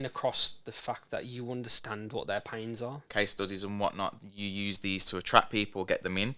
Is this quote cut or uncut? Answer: cut